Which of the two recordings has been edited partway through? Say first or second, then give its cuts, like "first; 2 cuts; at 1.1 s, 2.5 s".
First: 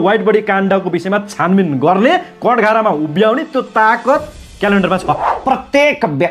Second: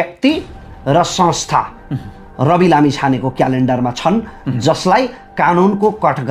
first; 1 cut; at 5.3 s